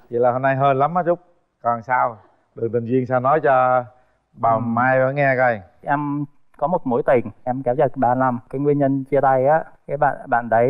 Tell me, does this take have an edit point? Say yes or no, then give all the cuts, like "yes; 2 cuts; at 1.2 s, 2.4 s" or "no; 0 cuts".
no; 0 cuts